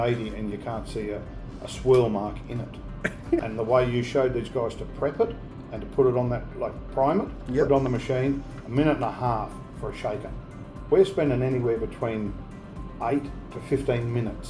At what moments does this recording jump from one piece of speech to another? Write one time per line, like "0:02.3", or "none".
0:03.4